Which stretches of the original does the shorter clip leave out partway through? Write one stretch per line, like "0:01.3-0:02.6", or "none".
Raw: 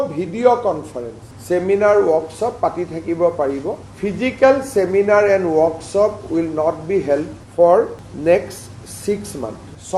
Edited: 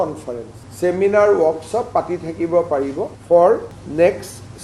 0:03.8-0:07.4